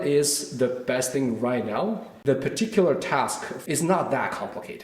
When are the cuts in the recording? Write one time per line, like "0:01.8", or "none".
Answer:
0:02.1
0:03.5